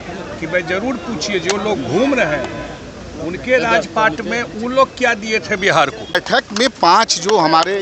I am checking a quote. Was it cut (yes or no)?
yes